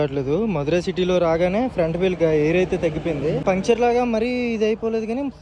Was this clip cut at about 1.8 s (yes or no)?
no